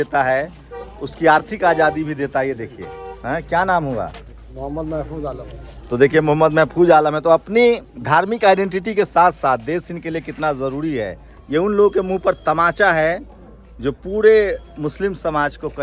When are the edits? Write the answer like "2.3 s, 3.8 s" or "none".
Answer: 11.3 s